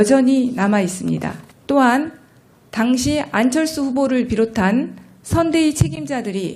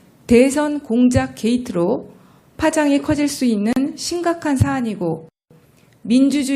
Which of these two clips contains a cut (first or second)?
second